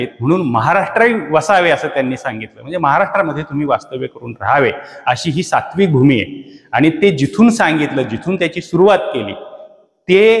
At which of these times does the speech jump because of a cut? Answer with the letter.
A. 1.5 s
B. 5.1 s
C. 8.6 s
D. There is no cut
D